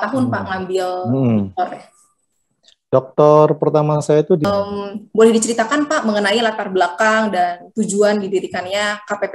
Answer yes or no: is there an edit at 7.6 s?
no